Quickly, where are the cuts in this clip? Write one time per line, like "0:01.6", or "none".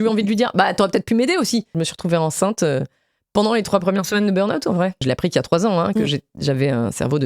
0:01.7
0:05.0